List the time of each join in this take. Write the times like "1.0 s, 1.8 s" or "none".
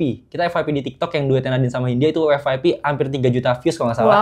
none